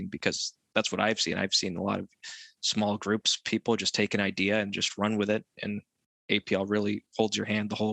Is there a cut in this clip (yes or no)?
no